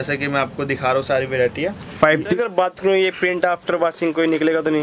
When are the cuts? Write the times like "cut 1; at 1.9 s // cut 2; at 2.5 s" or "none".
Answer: cut 1; at 2.2 s